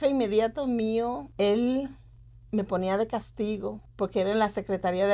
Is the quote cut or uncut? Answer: cut